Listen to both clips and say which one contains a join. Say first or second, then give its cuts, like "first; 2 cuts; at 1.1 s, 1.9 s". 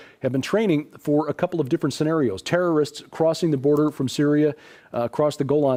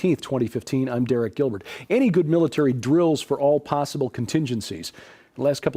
second; 1 cut; at 1.8 s